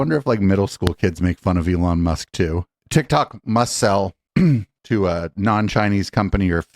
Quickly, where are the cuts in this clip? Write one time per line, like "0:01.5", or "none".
0:02.8